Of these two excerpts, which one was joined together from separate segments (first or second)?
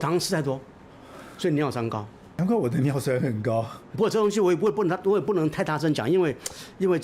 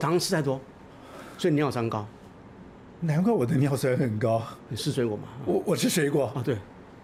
first